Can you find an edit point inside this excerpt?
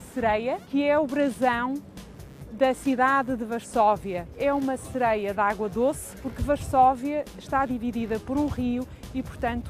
no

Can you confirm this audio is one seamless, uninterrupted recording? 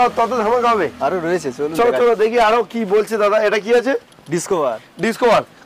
yes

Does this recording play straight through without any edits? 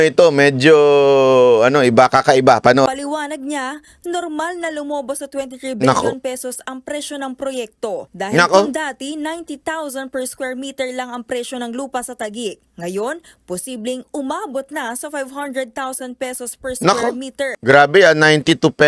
no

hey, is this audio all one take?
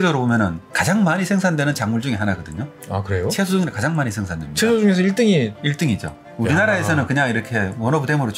yes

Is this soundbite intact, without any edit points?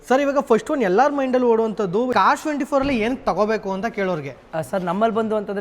no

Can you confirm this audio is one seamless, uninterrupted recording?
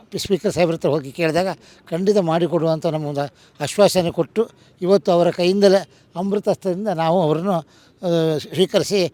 yes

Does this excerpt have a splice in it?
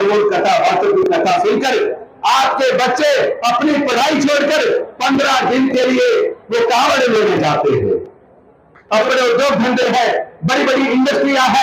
yes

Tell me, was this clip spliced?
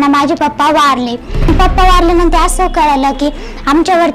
yes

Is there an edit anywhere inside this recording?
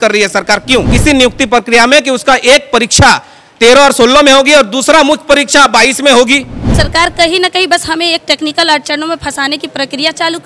yes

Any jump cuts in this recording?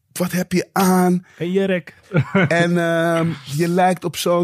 yes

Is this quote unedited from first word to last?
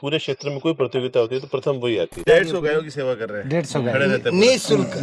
no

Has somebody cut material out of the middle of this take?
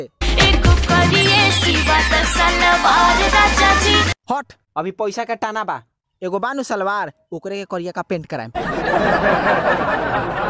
no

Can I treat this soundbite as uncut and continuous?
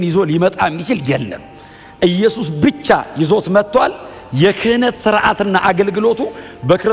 yes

